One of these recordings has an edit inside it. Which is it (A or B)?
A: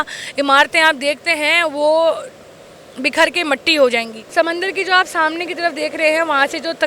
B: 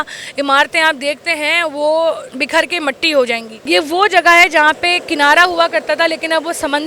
B